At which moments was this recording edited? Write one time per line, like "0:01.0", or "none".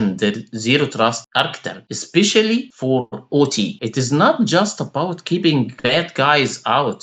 none